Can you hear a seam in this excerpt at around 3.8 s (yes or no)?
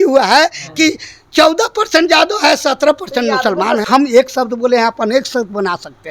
yes